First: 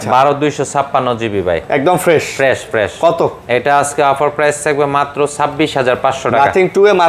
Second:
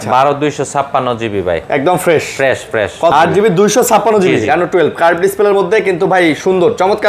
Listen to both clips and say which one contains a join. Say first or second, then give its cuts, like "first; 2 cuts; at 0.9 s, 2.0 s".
second; 1 cut; at 3.1 s